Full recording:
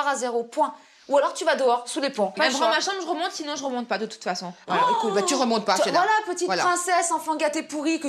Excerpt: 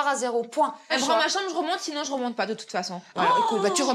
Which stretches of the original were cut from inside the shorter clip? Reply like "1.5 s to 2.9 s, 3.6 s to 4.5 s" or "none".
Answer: 0.9 s to 2.4 s